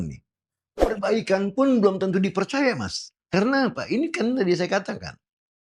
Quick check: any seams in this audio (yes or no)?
yes